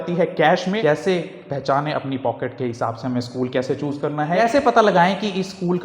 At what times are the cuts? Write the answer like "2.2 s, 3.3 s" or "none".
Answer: 0.8 s, 4.4 s